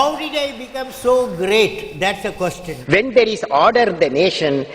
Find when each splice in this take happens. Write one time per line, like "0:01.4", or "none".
0:02.7